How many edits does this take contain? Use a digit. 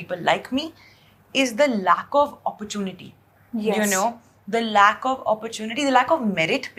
0